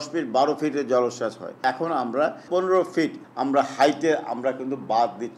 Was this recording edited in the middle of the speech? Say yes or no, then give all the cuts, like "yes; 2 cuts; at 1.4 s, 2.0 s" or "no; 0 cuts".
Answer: yes; 3 cuts; at 1.6 s, 2.5 s, 3.2 s